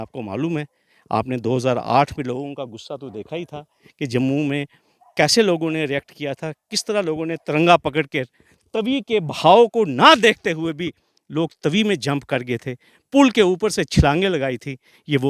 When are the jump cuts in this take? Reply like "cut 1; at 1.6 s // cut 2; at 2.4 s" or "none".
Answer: none